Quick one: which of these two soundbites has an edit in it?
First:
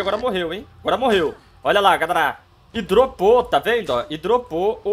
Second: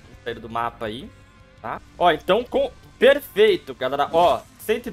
second; 1 cut; at 1.9 s

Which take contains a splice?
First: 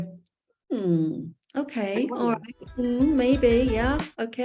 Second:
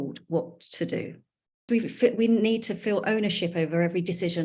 second; 1 cut; at 1.6 s

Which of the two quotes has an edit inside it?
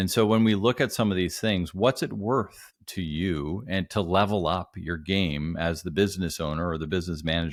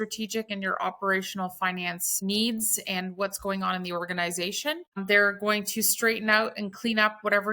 second; 2 cuts; at 2.1 s, 5.0 s

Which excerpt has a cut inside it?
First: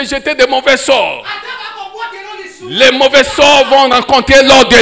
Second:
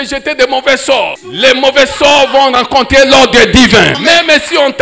second; 2 cuts; at 1.2 s, 4.0 s

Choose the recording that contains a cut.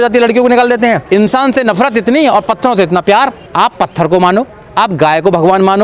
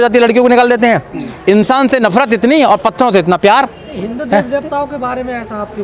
first; 2 cuts; at 1.0 s, 3.4 s

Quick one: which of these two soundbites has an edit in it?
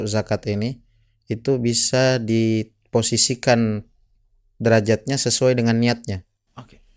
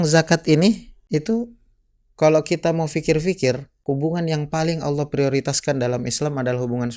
second; 2 cuts; at 0.9 s, 3.7 s

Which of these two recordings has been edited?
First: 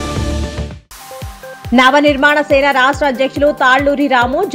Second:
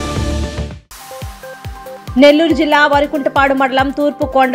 second; 1 cut; at 1.6 s

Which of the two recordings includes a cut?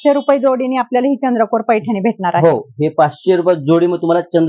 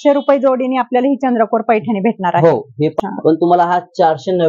second; 1 cut; at 2.9 s

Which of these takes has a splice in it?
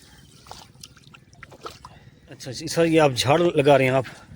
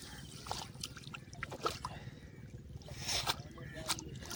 first; 1 cut; at 2.6 s

